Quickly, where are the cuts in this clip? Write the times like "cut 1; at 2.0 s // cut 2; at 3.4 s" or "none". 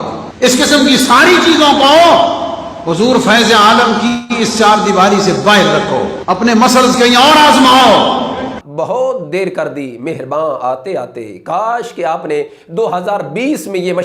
cut 1; at 8.6 s

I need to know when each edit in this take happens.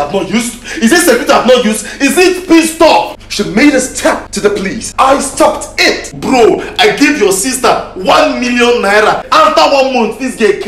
cut 1; at 3.1 s // cut 2; at 4.6 s // cut 3; at 6.2 s // cut 4; at 9.2 s

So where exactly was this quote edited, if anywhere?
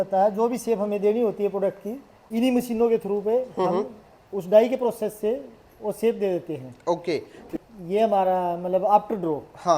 cut 1; at 7.5 s

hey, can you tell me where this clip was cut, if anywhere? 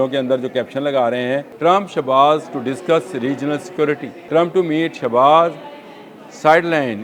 cut 1; at 1.5 s // cut 2; at 4.1 s

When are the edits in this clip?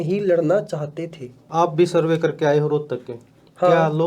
cut 1; at 1.3 s

